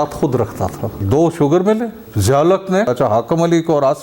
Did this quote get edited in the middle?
yes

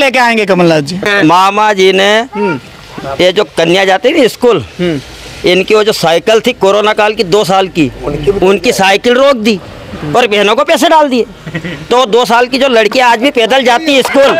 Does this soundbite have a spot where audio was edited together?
yes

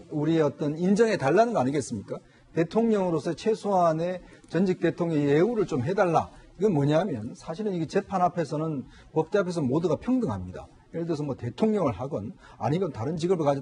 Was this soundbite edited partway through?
no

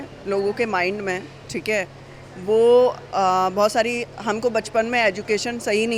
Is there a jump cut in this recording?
no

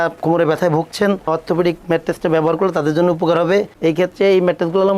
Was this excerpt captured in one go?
yes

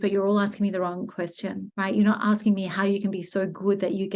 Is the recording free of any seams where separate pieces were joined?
no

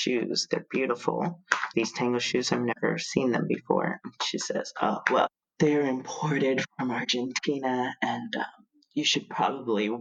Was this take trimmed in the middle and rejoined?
no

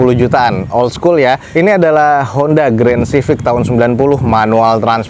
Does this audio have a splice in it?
no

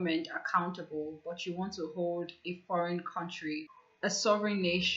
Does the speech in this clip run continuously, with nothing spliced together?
no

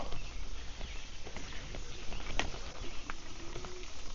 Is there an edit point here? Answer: no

